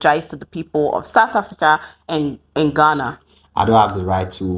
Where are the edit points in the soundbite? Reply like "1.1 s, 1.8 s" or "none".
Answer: 3.4 s